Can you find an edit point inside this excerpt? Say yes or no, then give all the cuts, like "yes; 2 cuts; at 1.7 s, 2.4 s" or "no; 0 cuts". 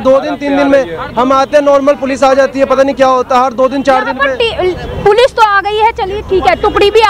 no; 0 cuts